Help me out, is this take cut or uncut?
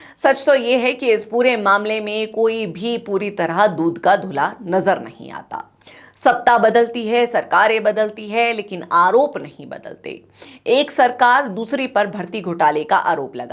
uncut